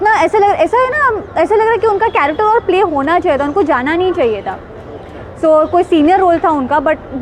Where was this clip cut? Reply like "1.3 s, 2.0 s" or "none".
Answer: none